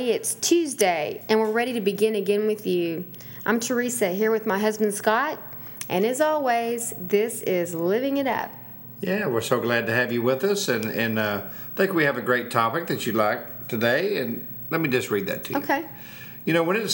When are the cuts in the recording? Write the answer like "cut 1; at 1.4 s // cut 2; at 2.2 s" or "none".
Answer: cut 1; at 1.1 s